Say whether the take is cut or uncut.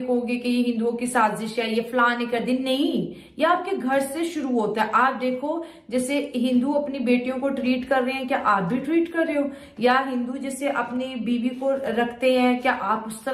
uncut